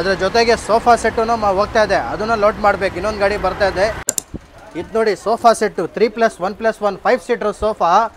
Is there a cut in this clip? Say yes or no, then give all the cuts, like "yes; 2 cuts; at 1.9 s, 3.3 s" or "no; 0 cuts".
yes; 1 cut; at 4.1 s